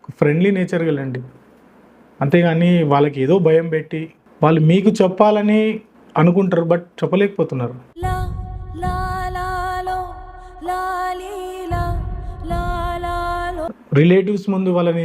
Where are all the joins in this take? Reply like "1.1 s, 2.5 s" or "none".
13.7 s